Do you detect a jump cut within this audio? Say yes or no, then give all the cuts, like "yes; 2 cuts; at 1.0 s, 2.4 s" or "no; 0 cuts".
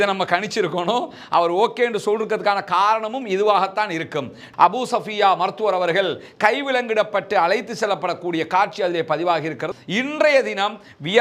yes; 2 cuts; at 4.4 s, 9.7 s